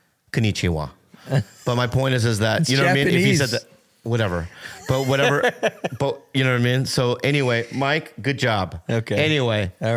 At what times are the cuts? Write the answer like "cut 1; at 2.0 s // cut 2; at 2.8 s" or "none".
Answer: none